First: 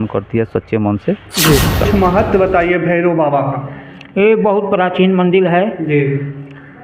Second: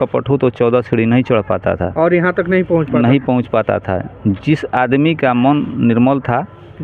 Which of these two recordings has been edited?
first; 1 cut; at 1.8 s

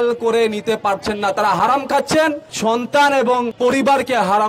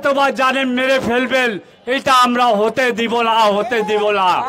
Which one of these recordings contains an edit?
first; 2 cuts; at 2.5 s, 3.5 s

